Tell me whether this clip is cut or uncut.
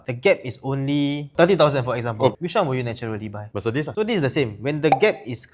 cut